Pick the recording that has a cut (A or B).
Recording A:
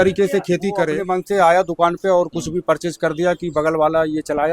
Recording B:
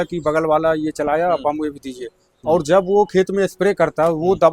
A